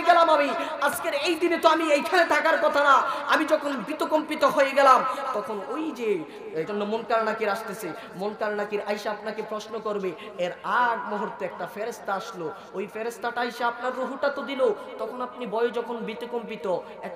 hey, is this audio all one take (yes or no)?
no